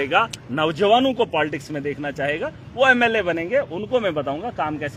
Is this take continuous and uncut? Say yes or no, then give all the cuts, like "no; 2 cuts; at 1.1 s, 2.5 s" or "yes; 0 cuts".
yes; 0 cuts